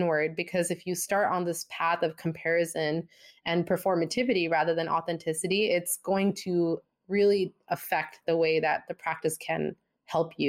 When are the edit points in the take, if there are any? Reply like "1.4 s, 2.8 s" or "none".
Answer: none

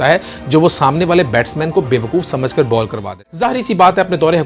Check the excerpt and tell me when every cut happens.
3.0 s

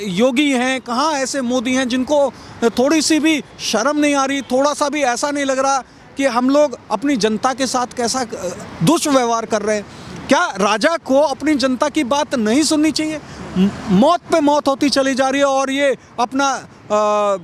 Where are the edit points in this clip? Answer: none

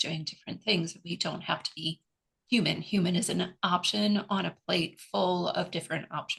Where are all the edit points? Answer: none

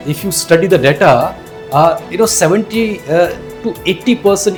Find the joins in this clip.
none

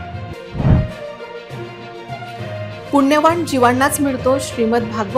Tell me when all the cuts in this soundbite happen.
none

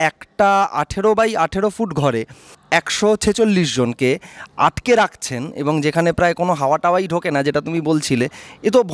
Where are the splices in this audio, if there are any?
2.6 s

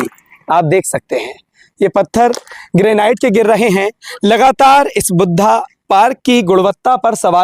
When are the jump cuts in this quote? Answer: none

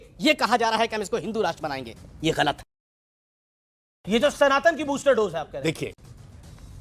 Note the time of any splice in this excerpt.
none

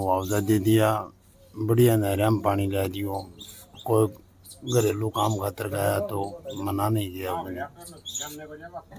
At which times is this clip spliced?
none

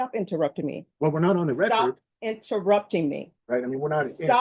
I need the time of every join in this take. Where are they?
3.3 s

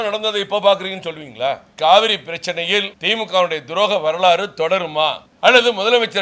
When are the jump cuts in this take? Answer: 1.7 s, 3.0 s, 5.2 s

